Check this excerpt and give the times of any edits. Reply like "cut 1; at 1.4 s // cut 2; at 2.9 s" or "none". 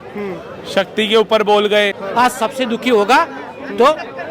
cut 1; at 2.0 s